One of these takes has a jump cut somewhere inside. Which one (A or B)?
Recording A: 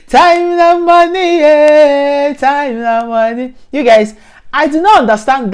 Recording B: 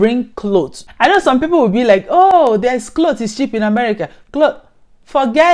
B